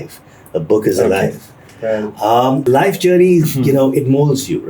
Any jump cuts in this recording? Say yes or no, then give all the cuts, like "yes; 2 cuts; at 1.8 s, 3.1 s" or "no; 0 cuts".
yes; 1 cut; at 2.6 s